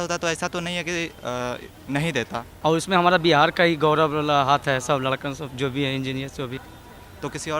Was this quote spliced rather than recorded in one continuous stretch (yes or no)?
yes